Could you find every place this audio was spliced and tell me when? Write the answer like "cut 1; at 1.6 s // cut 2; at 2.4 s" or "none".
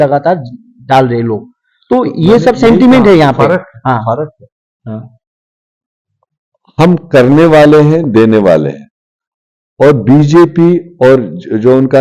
none